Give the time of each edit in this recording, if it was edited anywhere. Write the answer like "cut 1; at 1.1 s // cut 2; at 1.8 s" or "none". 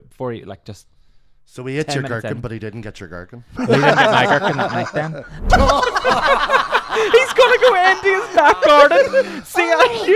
cut 1; at 5.5 s